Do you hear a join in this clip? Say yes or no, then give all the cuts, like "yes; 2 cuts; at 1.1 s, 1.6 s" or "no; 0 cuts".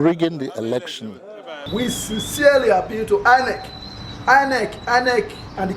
yes; 1 cut; at 1.5 s